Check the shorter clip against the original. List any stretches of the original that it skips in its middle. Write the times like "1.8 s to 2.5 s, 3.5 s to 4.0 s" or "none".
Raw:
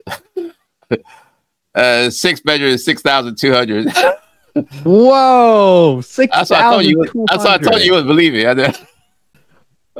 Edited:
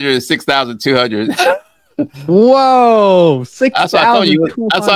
none